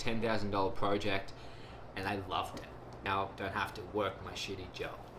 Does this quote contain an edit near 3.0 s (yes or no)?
yes